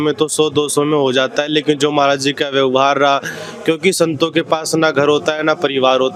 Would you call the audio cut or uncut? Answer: uncut